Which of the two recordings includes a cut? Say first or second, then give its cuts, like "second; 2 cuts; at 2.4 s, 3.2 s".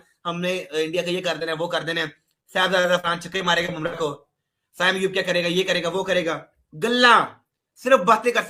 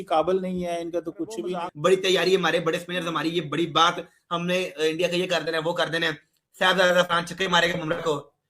second; 1 cut; at 1.6 s